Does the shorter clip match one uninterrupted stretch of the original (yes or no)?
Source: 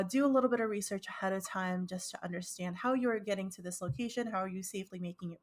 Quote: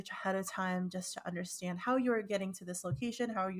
yes